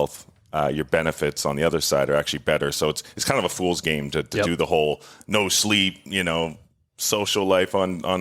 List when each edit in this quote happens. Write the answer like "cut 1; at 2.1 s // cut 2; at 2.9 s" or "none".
none